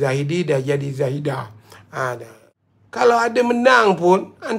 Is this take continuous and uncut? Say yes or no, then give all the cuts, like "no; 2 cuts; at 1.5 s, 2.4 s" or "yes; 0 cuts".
no; 1 cut; at 2.4 s